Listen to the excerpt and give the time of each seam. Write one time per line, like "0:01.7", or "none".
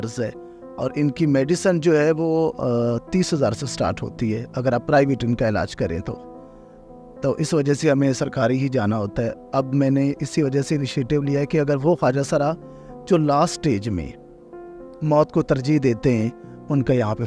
none